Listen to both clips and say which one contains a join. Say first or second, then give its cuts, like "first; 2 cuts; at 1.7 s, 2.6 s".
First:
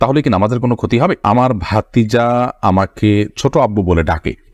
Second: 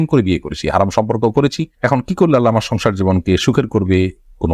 first; 1 cut; at 1.2 s